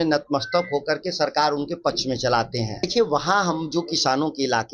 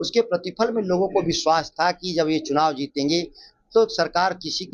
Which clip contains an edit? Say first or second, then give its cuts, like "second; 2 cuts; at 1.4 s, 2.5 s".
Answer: first; 1 cut; at 2.8 s